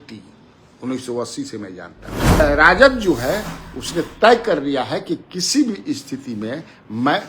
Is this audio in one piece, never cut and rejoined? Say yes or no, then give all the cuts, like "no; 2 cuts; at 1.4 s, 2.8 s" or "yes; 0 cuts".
no; 1 cut; at 2.4 s